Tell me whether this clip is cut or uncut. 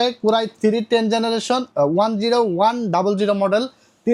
uncut